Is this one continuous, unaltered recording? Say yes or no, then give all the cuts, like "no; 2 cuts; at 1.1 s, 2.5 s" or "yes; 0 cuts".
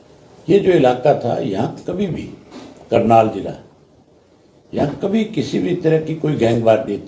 yes; 0 cuts